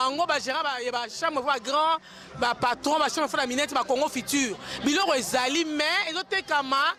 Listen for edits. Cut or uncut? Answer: uncut